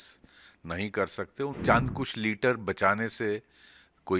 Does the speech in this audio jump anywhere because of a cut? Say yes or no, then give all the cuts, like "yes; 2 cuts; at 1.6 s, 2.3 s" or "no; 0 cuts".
yes; 1 cut; at 1.6 s